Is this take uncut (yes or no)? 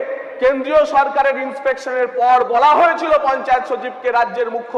yes